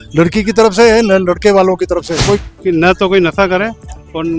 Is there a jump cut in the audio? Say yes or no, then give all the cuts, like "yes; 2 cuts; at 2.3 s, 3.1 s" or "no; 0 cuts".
yes; 1 cut; at 2.5 s